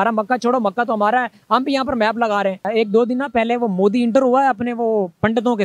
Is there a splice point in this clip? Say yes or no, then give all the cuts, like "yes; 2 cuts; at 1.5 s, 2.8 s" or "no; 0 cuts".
yes; 1 cut; at 2.6 s